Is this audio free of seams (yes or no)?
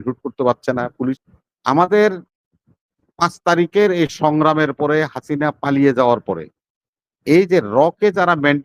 no